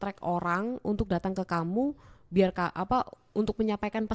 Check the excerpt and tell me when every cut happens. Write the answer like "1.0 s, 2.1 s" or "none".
none